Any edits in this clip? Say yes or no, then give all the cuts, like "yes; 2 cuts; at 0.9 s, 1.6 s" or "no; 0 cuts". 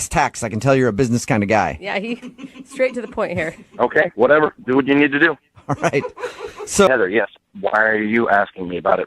yes; 1 cut; at 6.9 s